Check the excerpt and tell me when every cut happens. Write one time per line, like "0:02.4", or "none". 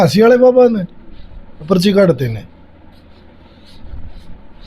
none